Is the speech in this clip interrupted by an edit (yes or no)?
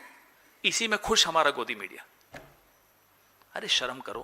no